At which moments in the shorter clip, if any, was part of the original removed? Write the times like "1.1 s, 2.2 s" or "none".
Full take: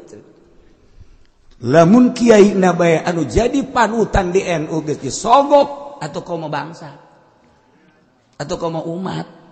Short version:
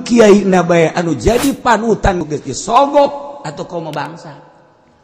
2.2 s